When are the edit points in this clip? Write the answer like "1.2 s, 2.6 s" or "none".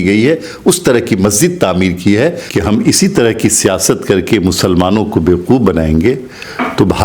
2.4 s